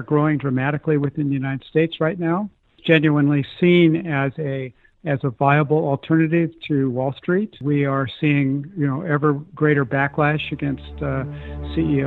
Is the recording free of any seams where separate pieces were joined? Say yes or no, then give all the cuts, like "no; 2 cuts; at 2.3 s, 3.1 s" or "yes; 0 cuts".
yes; 0 cuts